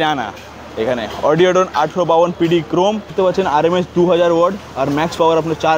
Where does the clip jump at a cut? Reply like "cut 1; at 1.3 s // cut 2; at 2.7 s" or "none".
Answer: cut 1; at 3.1 s